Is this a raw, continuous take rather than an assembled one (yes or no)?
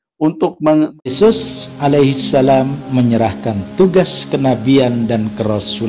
no